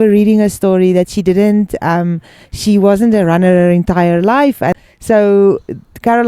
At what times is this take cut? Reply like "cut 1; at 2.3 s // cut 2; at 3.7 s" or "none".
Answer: cut 1; at 4.9 s